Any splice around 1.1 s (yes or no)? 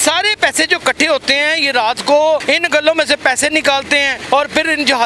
no